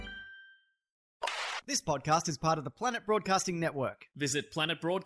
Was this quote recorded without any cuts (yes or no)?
no